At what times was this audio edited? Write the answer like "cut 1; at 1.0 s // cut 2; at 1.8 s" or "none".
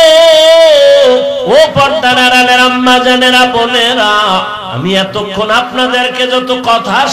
cut 1; at 1.4 s // cut 2; at 4.6 s